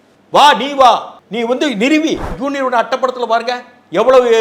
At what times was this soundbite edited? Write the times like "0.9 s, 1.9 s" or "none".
2.4 s

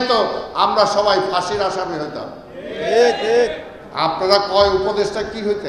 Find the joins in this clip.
none

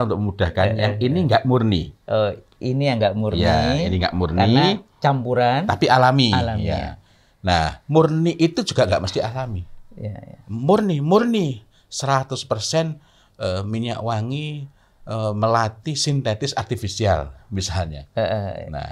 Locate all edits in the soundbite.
none

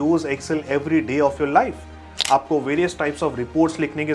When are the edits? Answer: 2.2 s

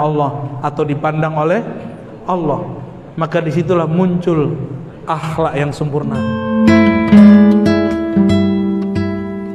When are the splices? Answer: 6.1 s

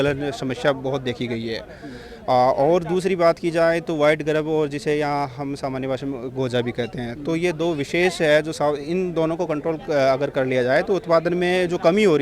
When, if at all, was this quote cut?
none

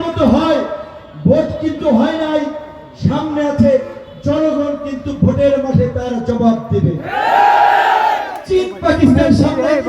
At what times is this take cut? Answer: 8.3 s

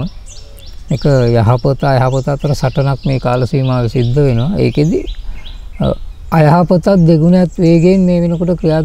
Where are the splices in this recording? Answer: none

